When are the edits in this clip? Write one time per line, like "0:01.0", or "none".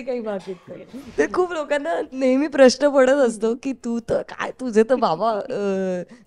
0:01.1